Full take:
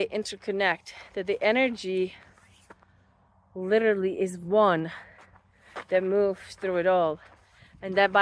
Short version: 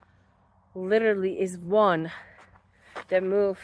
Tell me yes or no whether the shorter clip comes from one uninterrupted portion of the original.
yes